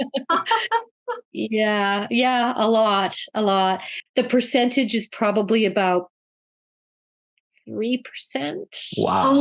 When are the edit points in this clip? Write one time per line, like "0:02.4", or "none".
0:03.9